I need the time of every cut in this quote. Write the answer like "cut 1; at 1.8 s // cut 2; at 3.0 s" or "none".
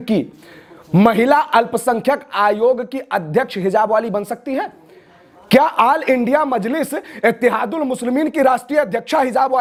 none